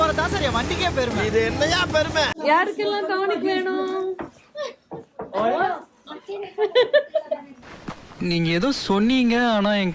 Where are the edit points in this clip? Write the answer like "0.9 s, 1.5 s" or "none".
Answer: 2.3 s